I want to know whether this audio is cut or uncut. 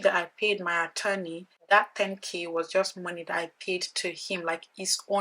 cut